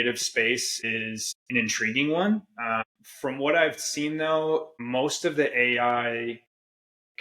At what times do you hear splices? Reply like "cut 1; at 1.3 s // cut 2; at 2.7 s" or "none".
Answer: cut 1; at 0.9 s // cut 2; at 2.8 s // cut 3; at 4.8 s